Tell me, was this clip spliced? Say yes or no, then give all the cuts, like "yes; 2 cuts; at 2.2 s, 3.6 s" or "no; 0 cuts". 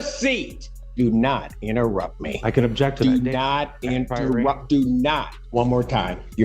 yes; 2 cuts; at 0.9 s, 5.4 s